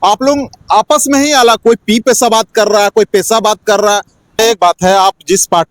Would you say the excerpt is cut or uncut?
cut